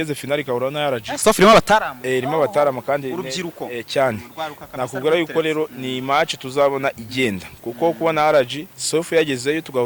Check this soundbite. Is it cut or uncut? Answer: uncut